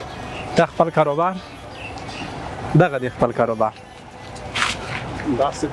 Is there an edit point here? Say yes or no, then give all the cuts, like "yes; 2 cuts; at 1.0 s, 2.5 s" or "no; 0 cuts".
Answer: no; 0 cuts